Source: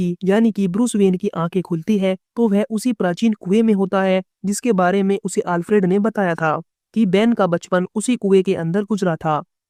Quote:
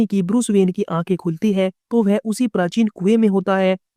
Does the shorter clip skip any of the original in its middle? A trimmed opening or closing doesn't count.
no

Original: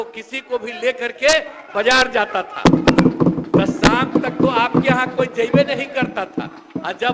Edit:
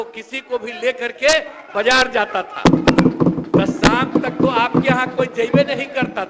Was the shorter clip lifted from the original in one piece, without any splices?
yes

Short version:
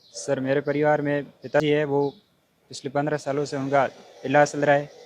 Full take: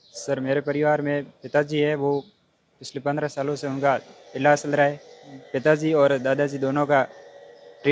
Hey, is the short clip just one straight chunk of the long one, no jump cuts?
no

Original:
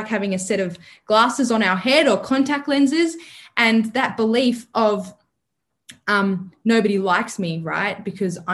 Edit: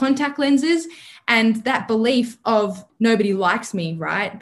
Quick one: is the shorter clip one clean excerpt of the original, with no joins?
no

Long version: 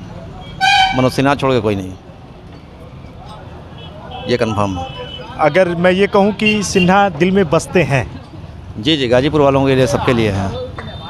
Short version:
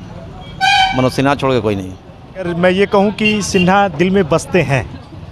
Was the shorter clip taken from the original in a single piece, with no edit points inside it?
no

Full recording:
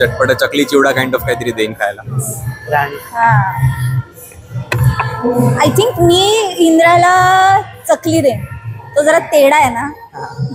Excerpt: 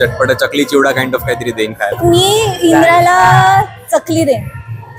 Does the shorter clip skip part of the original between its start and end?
yes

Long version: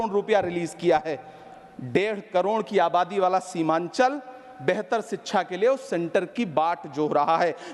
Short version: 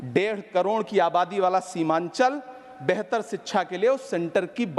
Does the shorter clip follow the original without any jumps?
yes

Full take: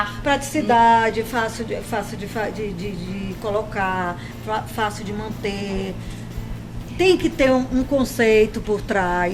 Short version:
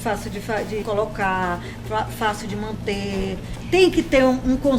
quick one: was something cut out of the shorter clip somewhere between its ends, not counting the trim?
yes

